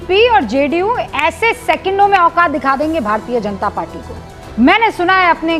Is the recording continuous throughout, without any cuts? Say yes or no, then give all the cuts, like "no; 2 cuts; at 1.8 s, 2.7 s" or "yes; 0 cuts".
yes; 0 cuts